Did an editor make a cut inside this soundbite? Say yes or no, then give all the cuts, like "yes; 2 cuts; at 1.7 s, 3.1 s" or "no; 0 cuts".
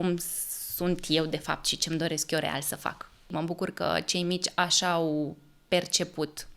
yes; 1 cut; at 3.3 s